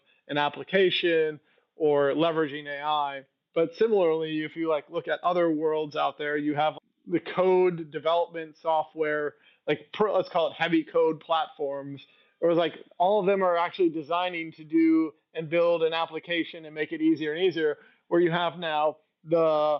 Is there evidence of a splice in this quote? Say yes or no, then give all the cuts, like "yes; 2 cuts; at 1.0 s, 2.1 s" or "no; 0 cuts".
no; 0 cuts